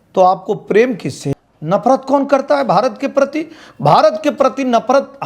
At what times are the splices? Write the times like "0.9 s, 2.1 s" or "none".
1.2 s